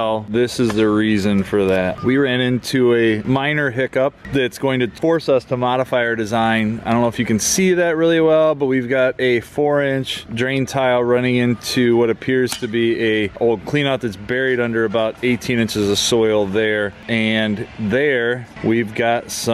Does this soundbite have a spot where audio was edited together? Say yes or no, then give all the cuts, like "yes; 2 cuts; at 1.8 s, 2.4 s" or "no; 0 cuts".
no; 0 cuts